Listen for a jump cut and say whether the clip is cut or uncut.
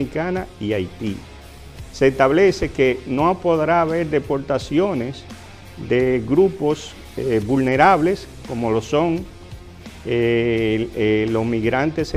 uncut